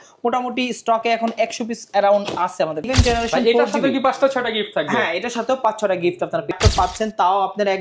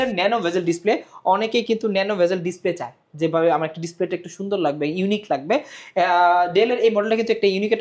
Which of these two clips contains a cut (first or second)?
first